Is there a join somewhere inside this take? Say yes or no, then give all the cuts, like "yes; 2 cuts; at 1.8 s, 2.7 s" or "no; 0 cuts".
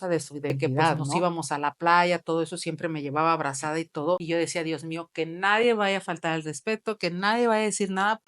yes; 2 cuts; at 1.1 s, 4.2 s